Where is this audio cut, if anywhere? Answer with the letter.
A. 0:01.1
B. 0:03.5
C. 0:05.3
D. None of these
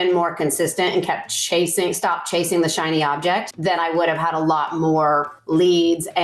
B